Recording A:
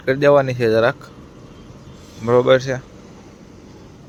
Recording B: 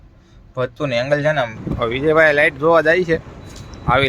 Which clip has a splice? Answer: B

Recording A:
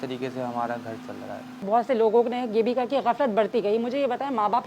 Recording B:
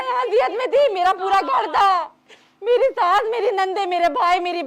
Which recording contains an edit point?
A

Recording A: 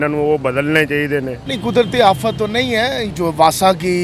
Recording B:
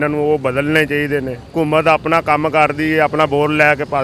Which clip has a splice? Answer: A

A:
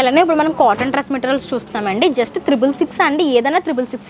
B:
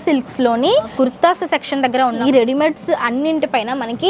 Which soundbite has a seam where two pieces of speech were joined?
B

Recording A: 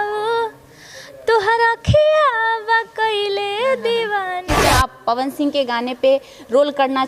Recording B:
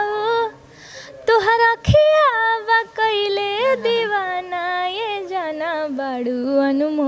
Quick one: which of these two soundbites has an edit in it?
A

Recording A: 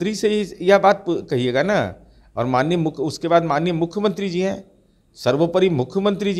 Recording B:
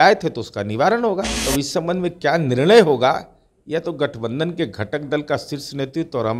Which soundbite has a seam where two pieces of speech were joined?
B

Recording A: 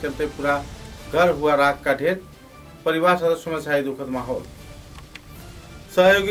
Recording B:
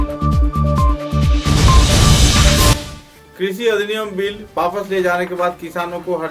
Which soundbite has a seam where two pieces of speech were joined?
B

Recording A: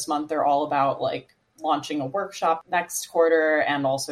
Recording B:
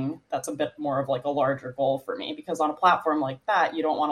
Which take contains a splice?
A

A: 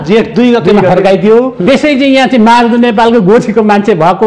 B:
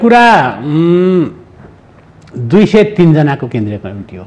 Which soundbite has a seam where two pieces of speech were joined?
A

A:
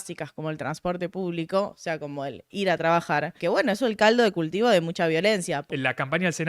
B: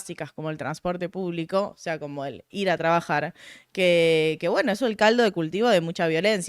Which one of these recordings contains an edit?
A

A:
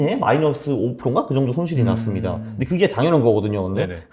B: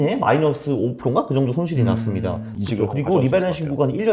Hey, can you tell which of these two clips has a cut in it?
B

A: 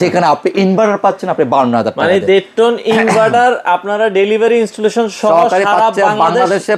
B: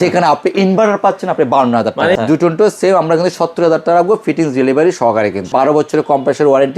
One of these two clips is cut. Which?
B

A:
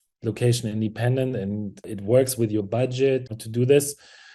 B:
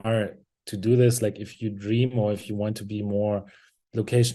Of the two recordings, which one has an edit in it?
A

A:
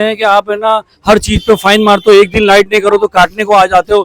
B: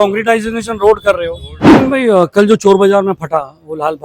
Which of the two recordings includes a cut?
B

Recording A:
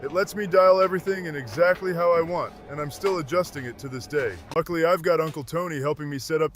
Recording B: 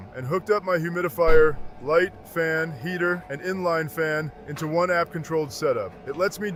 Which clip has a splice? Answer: A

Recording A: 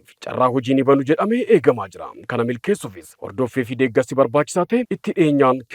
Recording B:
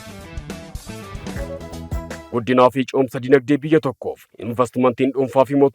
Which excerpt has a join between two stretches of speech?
B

